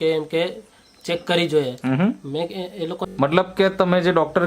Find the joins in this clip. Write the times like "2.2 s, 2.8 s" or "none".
3.0 s